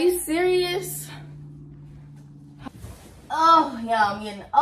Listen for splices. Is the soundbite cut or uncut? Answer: cut